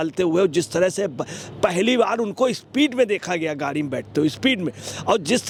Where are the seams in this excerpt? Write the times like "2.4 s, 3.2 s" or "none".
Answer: none